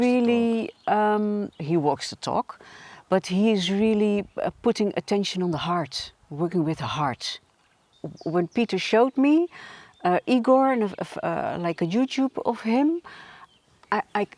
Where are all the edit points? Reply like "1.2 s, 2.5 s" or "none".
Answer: 8.0 s